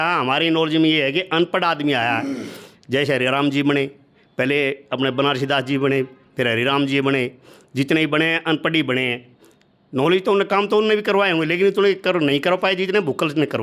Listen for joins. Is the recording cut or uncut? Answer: uncut